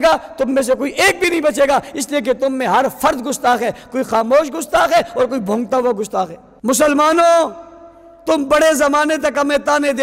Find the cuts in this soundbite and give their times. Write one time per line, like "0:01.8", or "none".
0:06.4